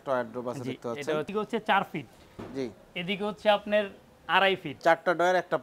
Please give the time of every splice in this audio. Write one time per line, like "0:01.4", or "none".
0:01.3
0:04.7